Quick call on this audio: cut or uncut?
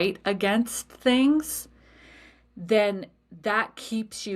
uncut